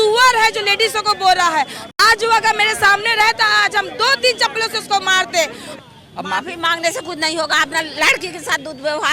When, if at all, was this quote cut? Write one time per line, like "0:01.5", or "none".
0:05.6